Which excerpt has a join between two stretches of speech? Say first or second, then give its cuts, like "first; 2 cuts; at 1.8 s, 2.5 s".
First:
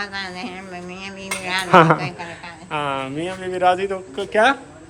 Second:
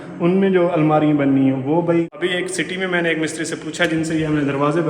second; 1 cut; at 2.1 s